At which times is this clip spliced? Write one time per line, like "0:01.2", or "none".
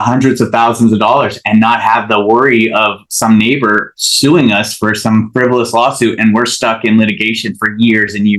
none